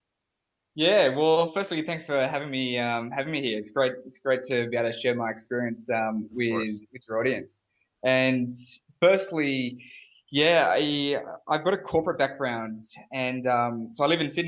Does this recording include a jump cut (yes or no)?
yes